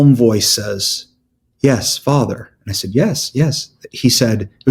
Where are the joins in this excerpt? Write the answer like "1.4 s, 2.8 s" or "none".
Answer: none